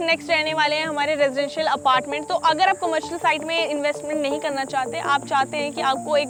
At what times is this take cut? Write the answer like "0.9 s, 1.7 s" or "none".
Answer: none